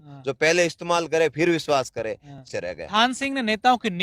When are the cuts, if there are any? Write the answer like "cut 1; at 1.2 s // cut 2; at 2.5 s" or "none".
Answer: cut 1; at 2.4 s